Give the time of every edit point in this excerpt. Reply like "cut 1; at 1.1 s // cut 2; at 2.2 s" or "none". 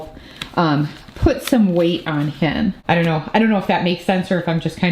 cut 1; at 2.8 s